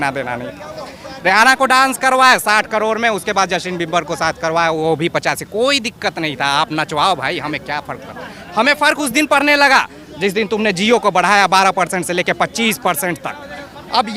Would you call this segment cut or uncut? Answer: uncut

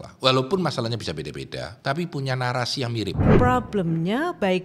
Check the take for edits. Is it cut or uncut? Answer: cut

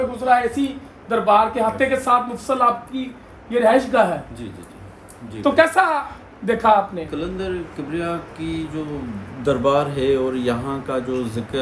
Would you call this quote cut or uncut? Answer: cut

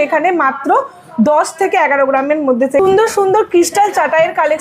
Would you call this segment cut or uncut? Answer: cut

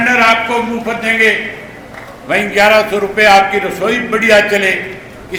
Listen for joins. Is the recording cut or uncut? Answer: uncut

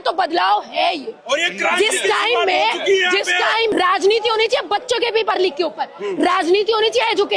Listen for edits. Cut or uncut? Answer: cut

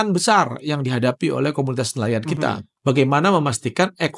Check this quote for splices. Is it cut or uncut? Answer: cut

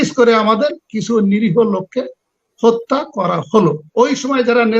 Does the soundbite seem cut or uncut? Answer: cut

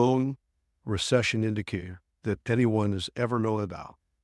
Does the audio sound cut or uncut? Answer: uncut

